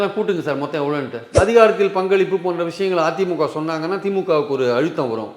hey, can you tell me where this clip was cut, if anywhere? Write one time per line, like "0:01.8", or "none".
0:01.2